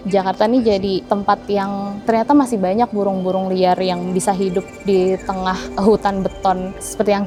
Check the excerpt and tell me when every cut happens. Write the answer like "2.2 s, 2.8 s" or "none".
none